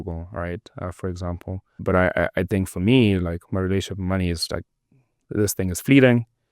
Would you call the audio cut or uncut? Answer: cut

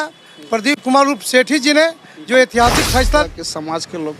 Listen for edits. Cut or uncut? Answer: cut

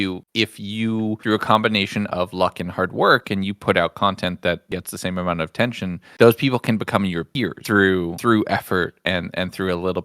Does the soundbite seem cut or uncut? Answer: uncut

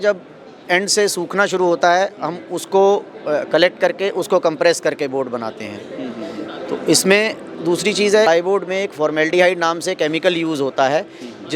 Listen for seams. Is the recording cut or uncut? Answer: cut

